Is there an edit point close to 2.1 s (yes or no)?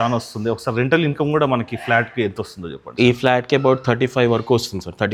no